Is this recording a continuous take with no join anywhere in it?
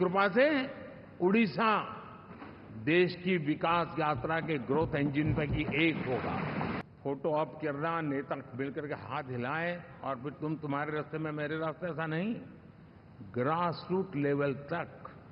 no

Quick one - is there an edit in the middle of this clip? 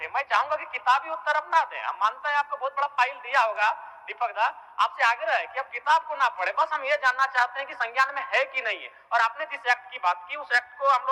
no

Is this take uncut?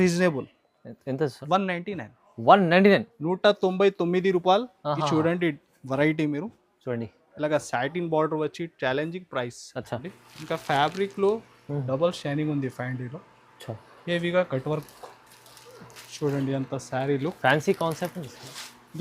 no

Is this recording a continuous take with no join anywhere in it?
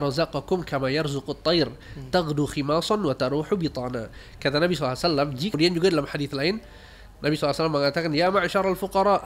no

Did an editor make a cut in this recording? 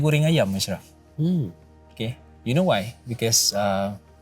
no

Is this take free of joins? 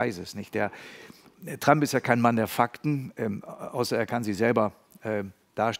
yes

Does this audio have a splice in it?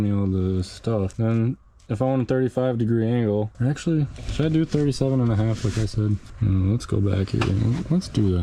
no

